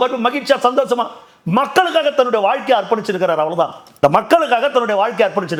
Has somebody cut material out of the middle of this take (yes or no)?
no